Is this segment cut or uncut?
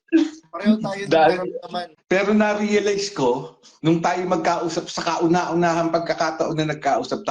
cut